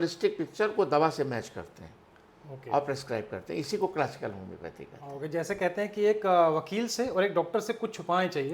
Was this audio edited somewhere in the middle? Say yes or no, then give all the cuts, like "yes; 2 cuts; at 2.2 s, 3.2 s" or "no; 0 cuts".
no; 0 cuts